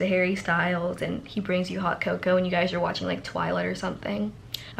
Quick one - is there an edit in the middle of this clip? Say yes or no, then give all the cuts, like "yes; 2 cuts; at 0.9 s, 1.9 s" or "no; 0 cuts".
no; 0 cuts